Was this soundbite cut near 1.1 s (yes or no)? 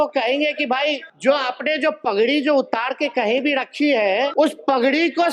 yes